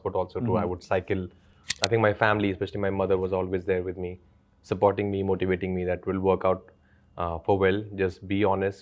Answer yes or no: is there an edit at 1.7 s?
yes